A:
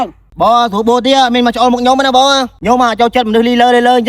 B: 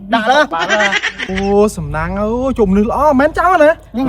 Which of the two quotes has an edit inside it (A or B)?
A